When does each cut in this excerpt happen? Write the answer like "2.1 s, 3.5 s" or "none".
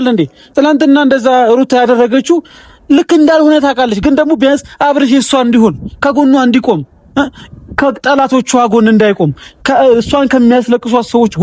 none